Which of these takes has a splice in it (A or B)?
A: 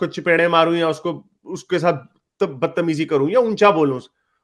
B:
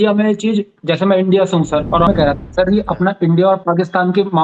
B